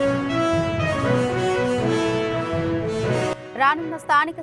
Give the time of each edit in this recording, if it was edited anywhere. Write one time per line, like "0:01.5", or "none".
none